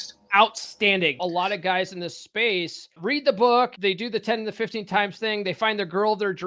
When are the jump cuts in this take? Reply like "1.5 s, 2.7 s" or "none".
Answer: 1.2 s, 3.0 s, 3.7 s